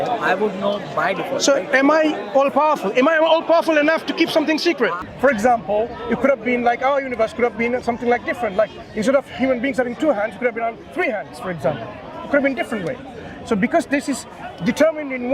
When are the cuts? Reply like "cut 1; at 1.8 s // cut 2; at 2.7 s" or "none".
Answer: cut 1; at 5.0 s